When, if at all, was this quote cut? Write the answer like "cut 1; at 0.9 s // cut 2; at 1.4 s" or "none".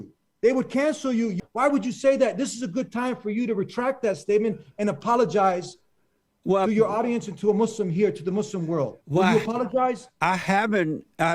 cut 1; at 1.4 s